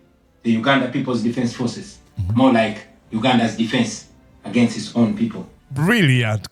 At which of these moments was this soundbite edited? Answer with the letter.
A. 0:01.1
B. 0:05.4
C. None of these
B